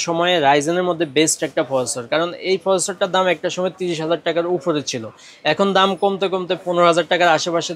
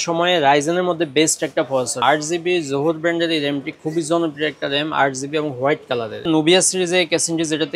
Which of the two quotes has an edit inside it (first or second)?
second